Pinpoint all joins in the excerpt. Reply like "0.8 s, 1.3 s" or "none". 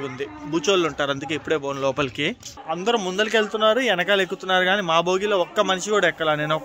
2.6 s